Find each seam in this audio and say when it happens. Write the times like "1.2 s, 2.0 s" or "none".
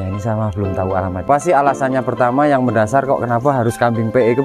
1.2 s